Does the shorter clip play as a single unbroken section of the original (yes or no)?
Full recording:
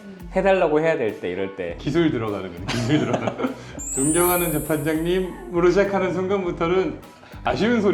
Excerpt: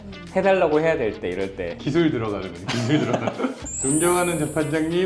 no